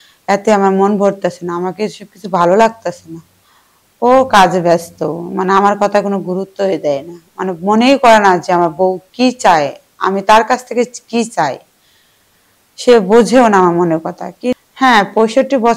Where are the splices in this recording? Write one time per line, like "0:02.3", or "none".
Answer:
0:14.5